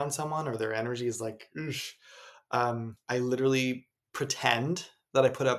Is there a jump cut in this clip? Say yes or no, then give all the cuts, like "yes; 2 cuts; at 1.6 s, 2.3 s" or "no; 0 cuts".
yes; 1 cut; at 3.0 s